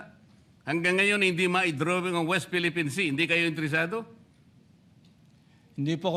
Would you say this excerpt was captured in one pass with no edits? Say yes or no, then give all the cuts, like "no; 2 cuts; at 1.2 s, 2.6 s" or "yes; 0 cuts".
yes; 0 cuts